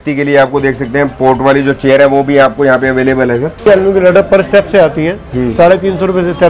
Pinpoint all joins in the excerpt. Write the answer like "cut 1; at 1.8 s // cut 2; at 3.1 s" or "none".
cut 1; at 3.6 s